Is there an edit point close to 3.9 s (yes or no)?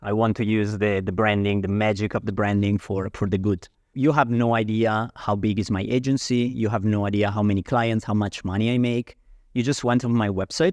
yes